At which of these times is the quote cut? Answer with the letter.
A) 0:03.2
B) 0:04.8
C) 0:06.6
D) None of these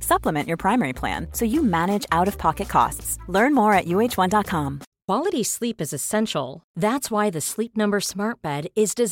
B